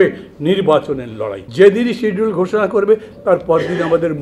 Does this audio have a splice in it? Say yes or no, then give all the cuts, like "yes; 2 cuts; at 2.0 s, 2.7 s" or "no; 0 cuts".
yes; 1 cut; at 1.4 s